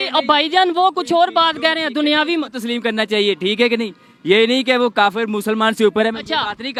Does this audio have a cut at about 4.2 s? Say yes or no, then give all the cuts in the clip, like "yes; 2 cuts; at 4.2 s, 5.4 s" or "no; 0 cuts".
no; 0 cuts